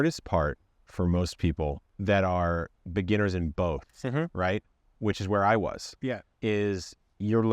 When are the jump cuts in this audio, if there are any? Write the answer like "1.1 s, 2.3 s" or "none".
1.9 s, 6.3 s